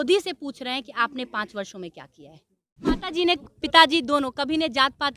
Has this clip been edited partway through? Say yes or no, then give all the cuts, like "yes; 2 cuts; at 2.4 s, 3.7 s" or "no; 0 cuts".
yes; 1 cut; at 3.0 s